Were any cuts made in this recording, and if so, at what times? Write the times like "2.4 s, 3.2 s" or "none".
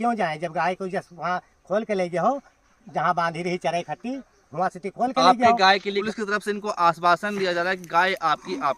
6.0 s